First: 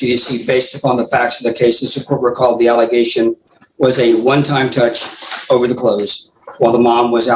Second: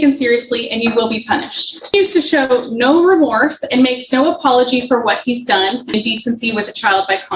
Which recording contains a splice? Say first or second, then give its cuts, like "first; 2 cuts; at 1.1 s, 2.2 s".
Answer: second; 2 cuts; at 1.9 s, 5.9 s